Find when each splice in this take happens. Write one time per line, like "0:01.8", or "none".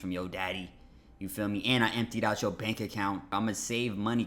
0:03.3